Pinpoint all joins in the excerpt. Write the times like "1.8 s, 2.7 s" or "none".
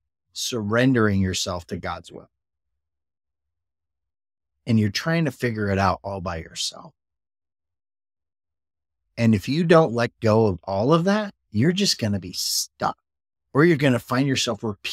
none